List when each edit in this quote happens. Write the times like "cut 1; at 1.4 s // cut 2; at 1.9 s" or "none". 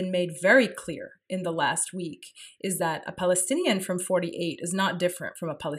none